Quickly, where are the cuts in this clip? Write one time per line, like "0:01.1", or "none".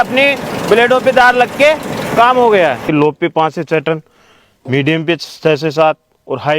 0:02.8

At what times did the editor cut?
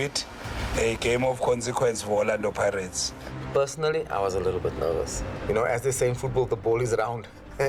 0:03.0
0:05.2

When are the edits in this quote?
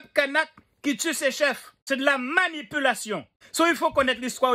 0:01.7
0:03.4

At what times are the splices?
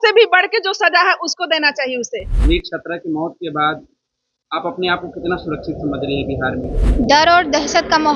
0:02.3
0:06.8

